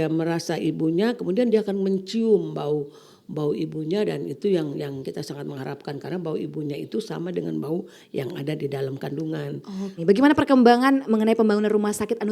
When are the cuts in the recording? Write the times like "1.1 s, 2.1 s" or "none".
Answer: 10.0 s